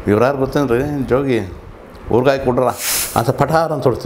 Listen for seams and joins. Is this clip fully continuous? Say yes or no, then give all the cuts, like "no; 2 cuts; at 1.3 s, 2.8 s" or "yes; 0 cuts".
no; 1 cut; at 2.9 s